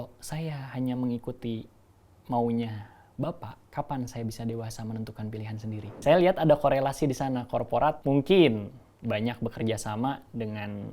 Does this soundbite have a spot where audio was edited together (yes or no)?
yes